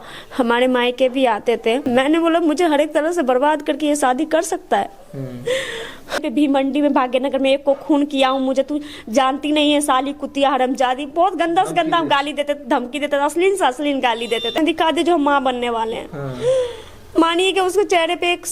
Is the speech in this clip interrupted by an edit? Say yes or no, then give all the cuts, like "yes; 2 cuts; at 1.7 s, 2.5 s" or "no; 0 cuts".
yes; 3 cuts; at 1.8 s, 6.2 s, 14.6 s